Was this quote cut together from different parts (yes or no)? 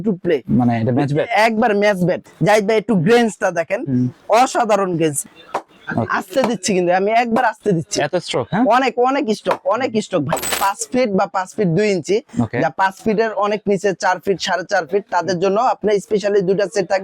yes